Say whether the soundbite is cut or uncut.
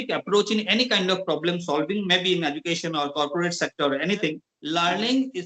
cut